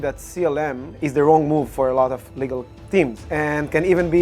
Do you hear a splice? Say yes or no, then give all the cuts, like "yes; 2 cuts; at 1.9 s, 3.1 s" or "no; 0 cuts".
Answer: yes; 2 cuts; at 1.0 s, 3.2 s